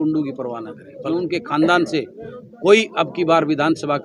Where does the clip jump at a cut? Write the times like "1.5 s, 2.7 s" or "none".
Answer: 1.0 s